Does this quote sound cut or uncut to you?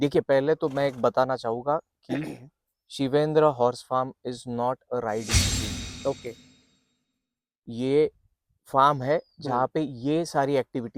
uncut